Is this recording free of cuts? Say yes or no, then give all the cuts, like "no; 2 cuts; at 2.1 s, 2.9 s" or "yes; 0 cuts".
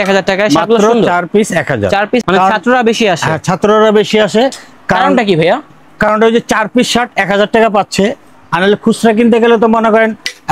no; 1 cut; at 2.2 s